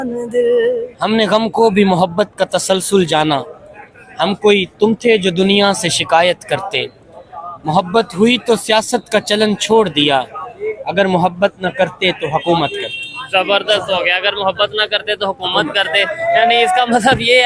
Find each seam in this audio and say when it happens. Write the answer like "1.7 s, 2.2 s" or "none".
1.0 s